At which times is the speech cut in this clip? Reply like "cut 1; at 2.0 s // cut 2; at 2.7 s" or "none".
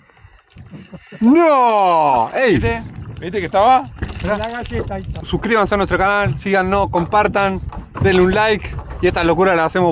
cut 1; at 5.1 s